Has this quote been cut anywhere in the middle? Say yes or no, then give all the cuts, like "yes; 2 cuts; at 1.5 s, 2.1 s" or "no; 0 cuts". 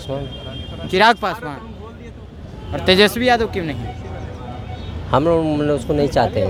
no; 0 cuts